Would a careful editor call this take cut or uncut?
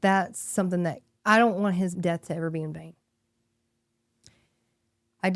cut